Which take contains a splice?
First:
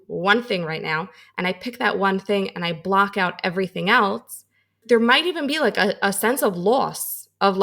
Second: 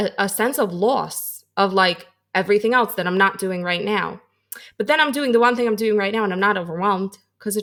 first; 1 cut; at 4.8 s

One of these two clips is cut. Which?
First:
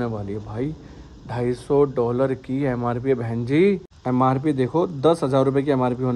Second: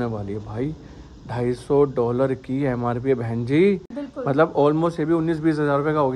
first; 1 cut; at 3.9 s

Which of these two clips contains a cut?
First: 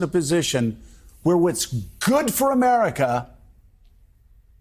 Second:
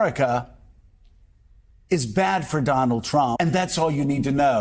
second; 1 cut; at 3.4 s

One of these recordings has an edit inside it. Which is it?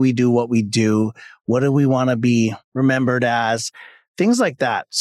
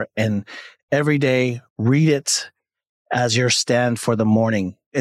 first; 1 cut; at 2.6 s

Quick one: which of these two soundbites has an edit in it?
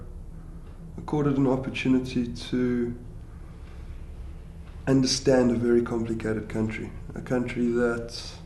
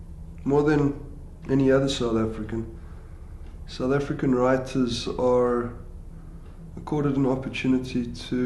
first; 1 cut; at 5.5 s

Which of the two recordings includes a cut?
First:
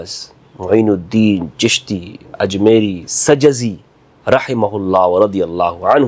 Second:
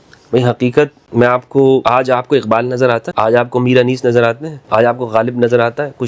second; 4 cuts; at 1.0 s, 1.8 s, 3.1 s, 4.5 s

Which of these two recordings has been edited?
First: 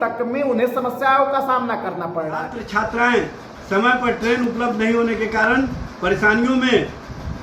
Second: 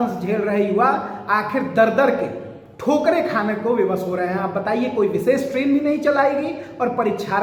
first; 1 cut; at 2.6 s

